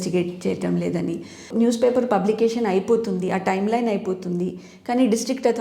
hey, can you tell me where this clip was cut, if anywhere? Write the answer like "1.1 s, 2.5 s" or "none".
none